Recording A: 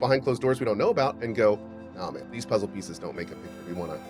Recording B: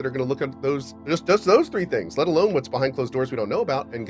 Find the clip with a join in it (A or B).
A